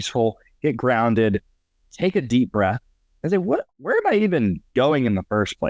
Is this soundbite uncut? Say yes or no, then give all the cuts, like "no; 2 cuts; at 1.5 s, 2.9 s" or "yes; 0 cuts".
no; 1 cut; at 3.8 s